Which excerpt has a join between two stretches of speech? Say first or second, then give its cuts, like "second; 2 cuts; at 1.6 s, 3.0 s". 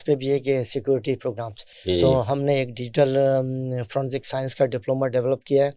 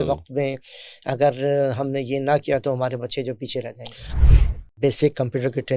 second; 1 cut; at 4.3 s